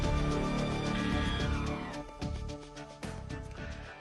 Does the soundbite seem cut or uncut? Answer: uncut